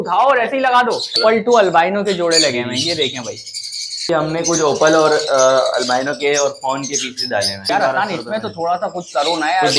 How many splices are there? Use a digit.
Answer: 3